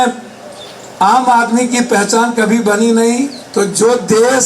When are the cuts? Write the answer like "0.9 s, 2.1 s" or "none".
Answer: 3.4 s